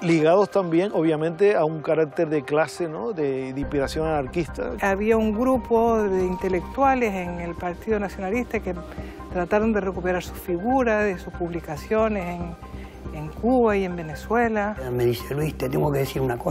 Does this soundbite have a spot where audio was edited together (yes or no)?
yes